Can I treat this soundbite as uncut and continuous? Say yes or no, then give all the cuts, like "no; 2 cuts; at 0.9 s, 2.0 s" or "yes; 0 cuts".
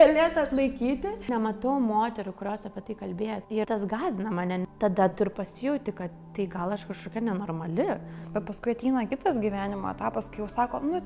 no; 4 cuts; at 1.3 s, 3.5 s, 4.7 s, 8.1 s